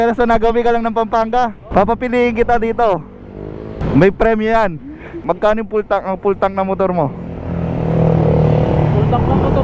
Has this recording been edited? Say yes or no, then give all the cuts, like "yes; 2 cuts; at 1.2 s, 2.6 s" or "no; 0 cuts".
yes; 3 cuts; at 1.6 s, 3.8 s, 5.1 s